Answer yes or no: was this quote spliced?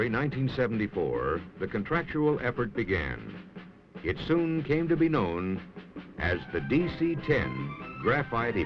yes